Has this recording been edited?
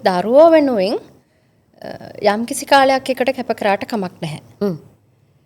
no; 0 cuts

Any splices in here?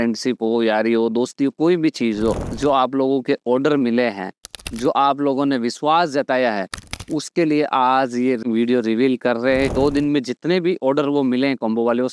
yes; 2 cuts; at 2.5 s, 9.7 s

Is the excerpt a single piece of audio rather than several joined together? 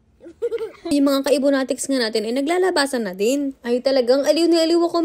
no; 1 cut; at 0.9 s

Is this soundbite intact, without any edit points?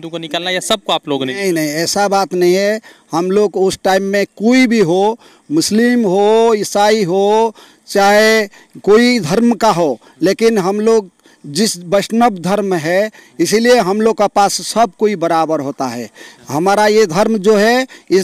yes; 0 cuts

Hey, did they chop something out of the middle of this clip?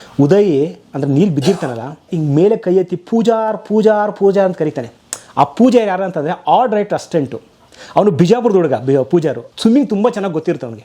yes; 2 cuts; at 2.1 s, 9.5 s

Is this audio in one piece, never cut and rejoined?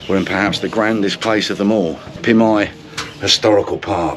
no; 1 cut; at 2.1 s

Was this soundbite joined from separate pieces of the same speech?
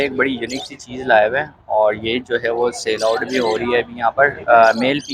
no; 0 cuts

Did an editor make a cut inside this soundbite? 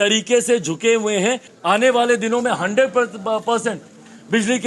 yes; 1 cut; at 1.5 s

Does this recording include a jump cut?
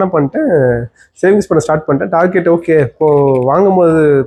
no; 0 cuts

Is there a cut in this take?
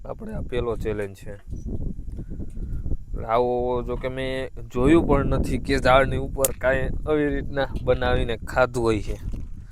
no; 0 cuts

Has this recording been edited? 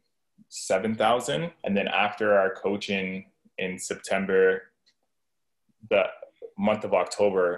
yes; 1 cut; at 1.5 s

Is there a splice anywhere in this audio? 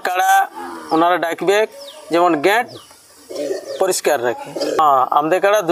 yes; 1 cut; at 4.8 s

